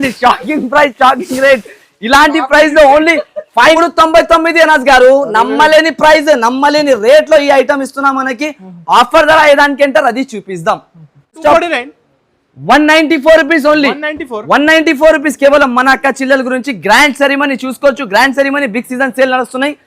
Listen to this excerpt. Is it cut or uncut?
cut